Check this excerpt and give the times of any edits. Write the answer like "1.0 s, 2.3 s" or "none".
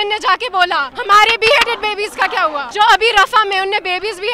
0.9 s, 2.7 s